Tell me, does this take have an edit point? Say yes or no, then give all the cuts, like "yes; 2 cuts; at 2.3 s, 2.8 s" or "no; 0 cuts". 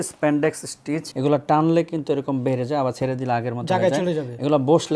yes; 1 cut; at 1.1 s